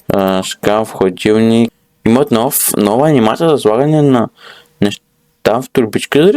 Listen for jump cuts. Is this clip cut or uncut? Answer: cut